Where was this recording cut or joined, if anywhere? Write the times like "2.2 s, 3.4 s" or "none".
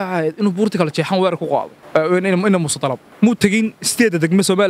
1.8 s, 3.0 s

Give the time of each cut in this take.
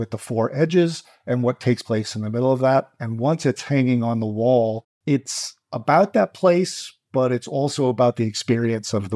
4.9 s

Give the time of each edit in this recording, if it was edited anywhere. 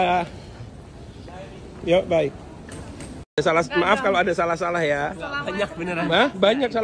3.3 s

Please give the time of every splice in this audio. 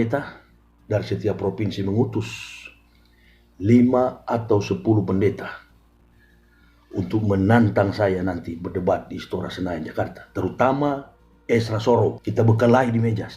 12.2 s

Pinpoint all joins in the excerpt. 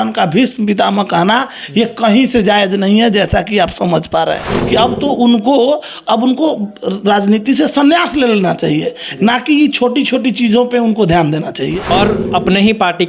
4.5 s, 11.9 s

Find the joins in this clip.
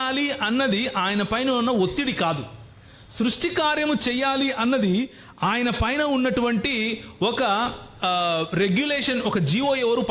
none

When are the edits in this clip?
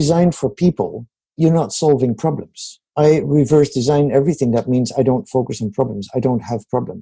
1.4 s, 2.8 s

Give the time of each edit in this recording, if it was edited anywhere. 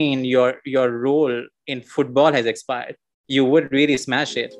none

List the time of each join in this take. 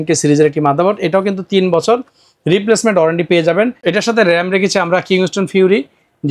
3.8 s

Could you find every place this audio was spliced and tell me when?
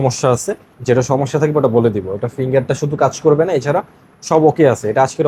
none

